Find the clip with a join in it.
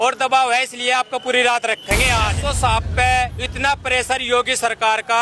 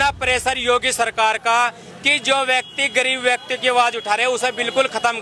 first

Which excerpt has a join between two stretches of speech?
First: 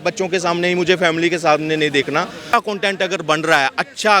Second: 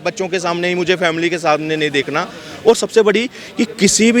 first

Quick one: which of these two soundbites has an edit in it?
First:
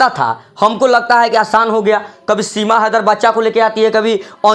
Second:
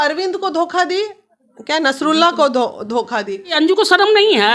second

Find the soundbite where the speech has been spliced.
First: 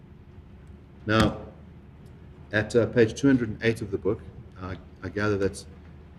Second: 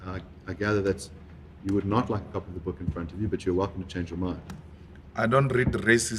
second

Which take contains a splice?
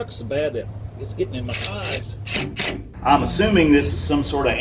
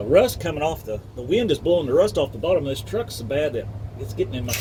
first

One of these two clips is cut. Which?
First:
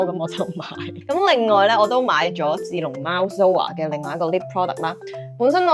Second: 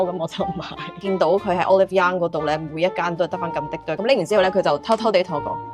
second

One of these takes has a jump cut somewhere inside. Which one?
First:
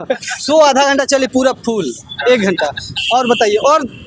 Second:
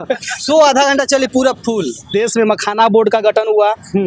second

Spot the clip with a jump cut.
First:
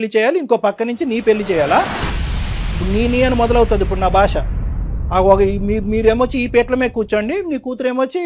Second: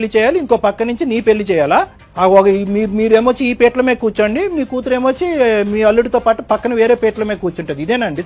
second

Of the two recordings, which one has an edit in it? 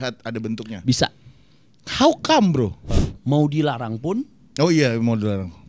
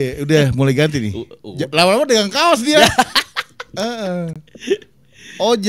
first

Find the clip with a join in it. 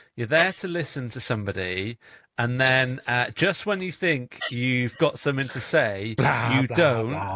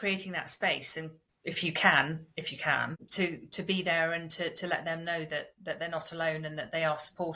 second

